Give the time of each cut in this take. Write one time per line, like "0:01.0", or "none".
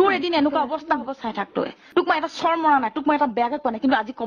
0:01.8